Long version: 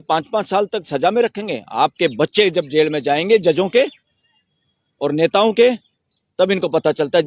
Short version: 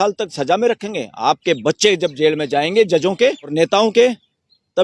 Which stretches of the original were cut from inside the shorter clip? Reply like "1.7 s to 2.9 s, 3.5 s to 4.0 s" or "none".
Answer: 4.0 s to 5.1 s